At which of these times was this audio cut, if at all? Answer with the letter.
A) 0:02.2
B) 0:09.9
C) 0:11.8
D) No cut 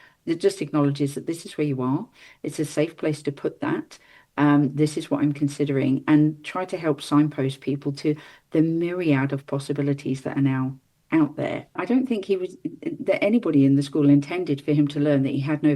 C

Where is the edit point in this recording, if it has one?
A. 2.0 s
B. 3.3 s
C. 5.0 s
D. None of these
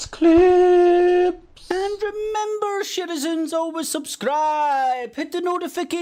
D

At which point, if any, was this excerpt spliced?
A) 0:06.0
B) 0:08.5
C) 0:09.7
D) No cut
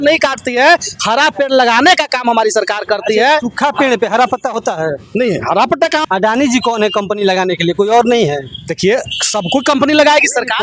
A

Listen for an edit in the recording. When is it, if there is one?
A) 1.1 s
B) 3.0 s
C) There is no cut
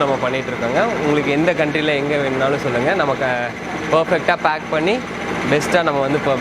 C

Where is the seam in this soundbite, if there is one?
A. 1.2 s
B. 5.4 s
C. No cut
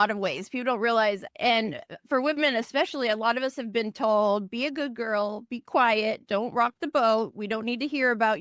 A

